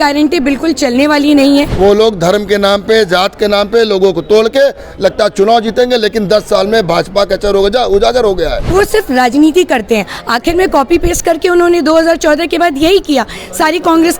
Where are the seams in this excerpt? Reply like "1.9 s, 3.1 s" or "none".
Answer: 1.7 s, 8.7 s

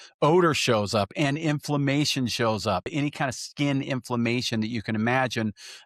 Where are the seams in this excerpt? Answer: 2.9 s

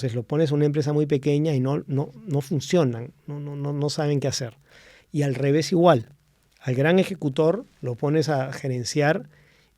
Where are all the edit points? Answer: none

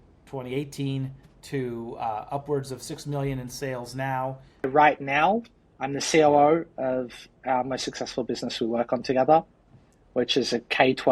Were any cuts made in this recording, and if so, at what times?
4.7 s

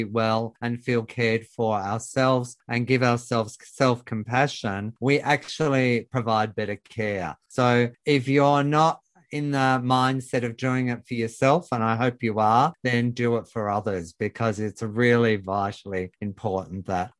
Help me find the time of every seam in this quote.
7.4 s

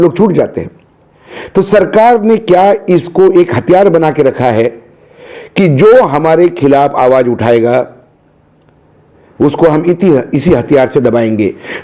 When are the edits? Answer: none

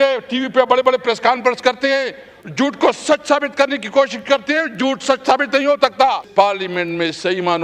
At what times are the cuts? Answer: 6.2 s

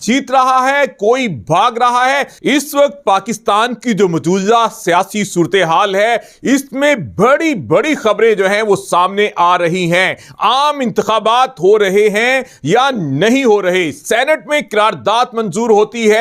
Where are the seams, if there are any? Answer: 2.3 s

